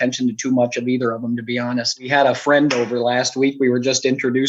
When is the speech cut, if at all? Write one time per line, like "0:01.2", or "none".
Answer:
0:02.1